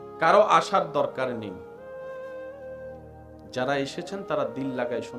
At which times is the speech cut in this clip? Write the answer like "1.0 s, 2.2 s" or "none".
1.7 s, 3.5 s